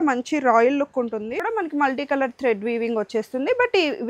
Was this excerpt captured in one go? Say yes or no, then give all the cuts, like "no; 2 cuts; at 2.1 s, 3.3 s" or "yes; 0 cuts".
no; 1 cut; at 1.4 s